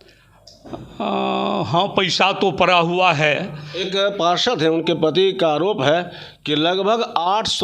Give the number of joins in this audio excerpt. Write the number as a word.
one